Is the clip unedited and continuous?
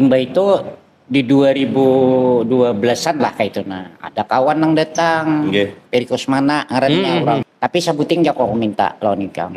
no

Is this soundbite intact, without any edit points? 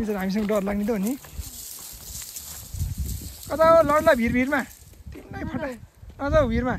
yes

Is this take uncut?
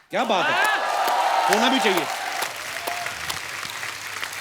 yes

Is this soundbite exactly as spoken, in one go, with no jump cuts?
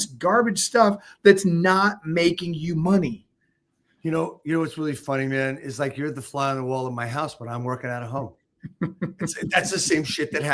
yes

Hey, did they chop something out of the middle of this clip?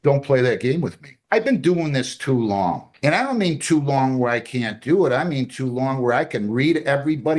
yes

